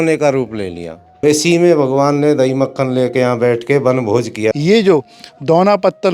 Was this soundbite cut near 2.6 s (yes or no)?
no